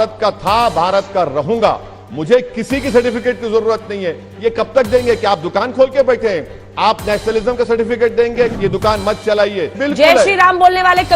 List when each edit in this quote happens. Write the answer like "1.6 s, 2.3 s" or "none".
8.5 s, 9.8 s